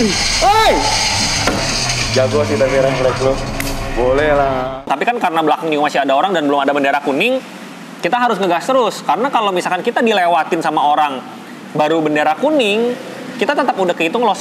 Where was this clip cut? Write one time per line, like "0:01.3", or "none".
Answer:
0:04.8